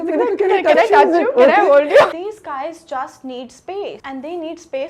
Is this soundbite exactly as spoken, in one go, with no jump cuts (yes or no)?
no